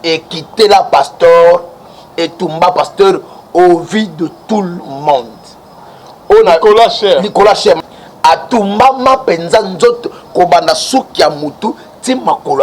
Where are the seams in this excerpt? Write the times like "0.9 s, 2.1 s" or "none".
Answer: 7.8 s

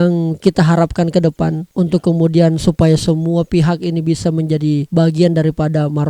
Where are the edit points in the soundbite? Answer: none

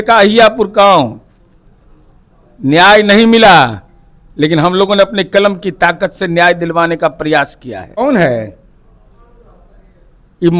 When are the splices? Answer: 7.9 s

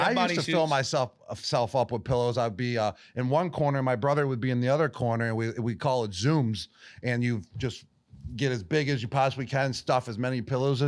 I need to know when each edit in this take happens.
none

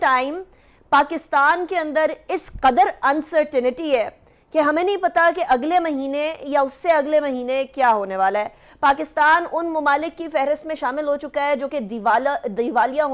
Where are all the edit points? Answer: none

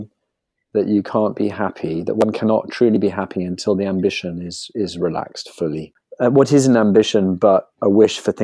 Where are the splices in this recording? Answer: 6.0 s

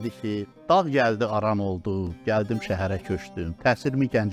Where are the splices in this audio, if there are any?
none

